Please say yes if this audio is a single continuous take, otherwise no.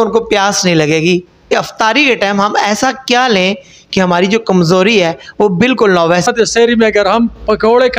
no